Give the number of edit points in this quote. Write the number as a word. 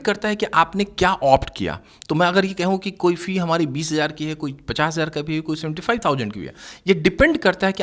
zero